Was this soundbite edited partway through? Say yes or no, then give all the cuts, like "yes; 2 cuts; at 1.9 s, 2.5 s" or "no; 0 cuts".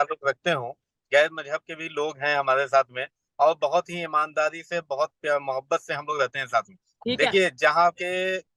no; 0 cuts